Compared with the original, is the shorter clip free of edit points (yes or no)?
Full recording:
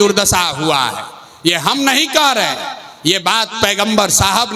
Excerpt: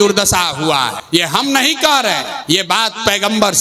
no